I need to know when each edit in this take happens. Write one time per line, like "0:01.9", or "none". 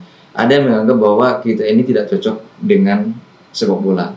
none